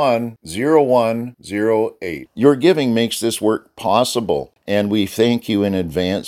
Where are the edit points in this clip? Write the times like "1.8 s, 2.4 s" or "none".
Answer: 4.5 s